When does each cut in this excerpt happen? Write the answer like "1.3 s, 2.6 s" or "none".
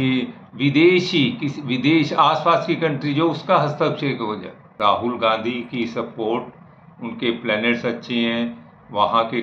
4.7 s

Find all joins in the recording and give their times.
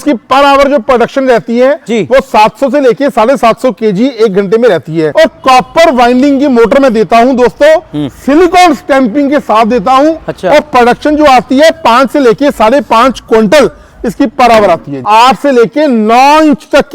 5.1 s, 14.9 s

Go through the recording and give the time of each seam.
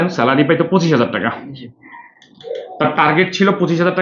none

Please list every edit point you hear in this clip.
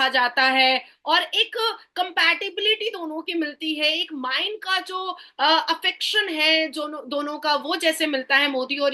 none

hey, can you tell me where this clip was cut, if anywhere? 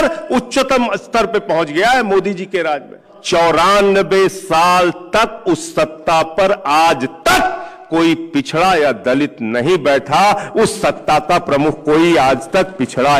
3.1 s

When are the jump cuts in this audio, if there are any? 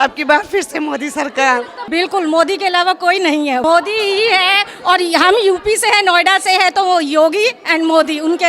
1.8 s, 3.6 s

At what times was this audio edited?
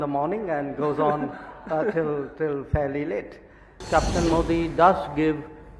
3.8 s

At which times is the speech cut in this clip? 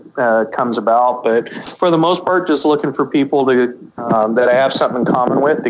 none

